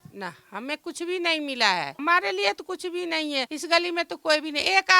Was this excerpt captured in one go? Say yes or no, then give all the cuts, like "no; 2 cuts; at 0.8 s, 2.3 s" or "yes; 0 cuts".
no; 2 cuts; at 1.9 s, 3.5 s